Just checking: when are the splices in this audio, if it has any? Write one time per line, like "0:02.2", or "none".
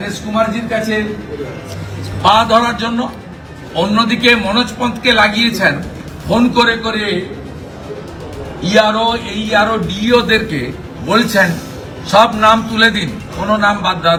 none